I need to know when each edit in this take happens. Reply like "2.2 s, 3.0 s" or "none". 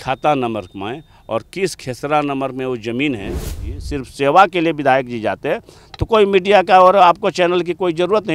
3.7 s

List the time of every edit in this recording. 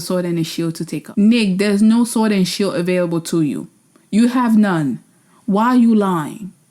1.0 s

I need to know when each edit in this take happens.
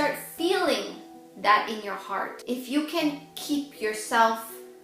2.4 s

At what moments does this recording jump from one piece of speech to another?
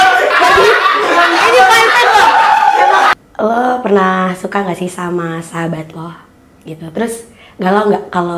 3.1 s

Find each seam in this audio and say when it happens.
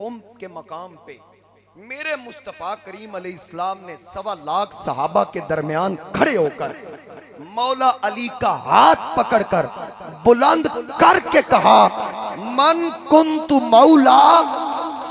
none

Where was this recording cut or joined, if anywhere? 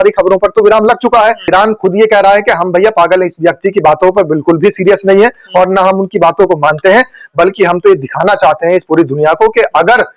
1.5 s

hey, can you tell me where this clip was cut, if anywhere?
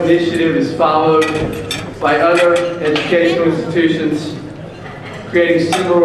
3.9 s

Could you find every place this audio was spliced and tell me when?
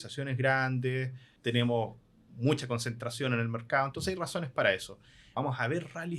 1.3 s, 5.2 s

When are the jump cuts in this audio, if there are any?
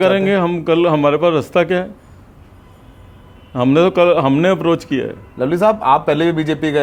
none

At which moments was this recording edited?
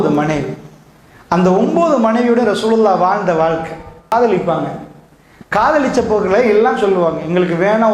4.1 s

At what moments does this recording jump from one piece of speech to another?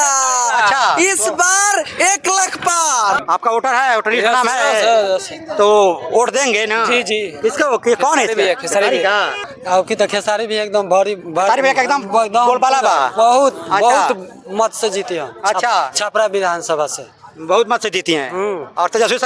3.2 s, 9.6 s

